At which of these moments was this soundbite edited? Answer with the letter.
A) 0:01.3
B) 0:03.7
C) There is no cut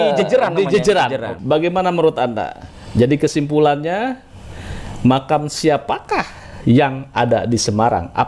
A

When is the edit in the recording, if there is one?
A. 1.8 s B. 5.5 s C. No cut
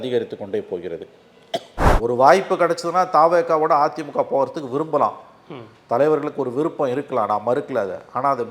A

